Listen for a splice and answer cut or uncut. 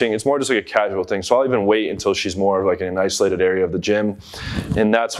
uncut